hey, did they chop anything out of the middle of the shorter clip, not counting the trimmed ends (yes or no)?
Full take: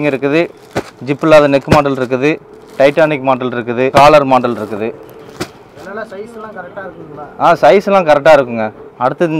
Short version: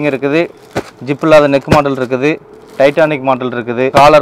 no